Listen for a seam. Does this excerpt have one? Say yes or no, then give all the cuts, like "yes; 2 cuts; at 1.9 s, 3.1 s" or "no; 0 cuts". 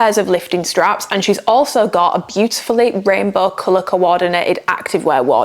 no; 0 cuts